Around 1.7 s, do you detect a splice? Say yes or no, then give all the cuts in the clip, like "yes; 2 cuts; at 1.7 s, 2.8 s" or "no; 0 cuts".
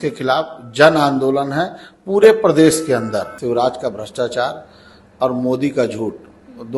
no; 1 cut; at 3.3 s